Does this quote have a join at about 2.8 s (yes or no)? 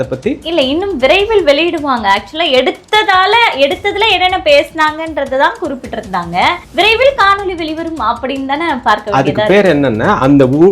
no